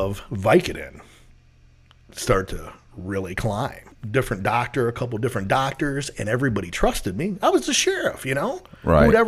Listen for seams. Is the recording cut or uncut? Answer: cut